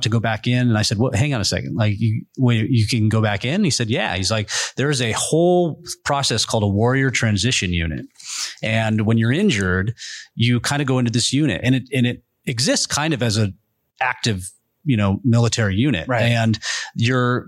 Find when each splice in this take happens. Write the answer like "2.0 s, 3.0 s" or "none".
none